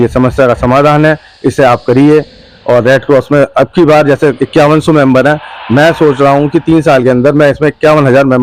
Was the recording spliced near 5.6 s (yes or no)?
no